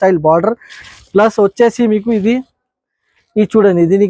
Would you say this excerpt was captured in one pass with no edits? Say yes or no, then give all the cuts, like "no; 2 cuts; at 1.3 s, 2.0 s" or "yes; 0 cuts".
yes; 0 cuts